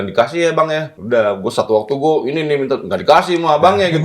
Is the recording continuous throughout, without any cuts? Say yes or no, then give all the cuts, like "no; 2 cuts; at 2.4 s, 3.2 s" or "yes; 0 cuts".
no; 1 cut; at 0.9 s